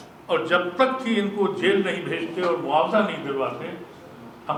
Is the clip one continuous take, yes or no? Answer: yes